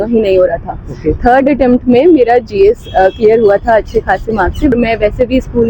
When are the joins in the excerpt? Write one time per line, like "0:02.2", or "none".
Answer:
0:04.7